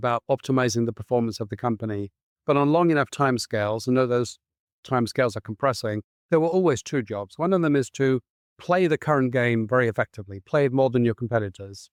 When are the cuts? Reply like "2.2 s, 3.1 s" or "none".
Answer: none